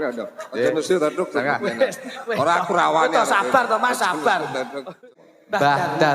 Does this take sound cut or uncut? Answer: cut